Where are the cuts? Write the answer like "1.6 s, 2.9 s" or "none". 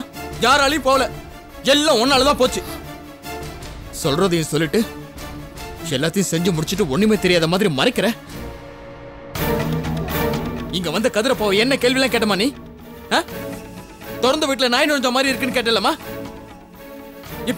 none